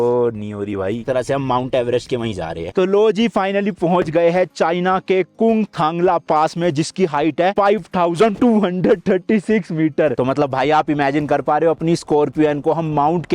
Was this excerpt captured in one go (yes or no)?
no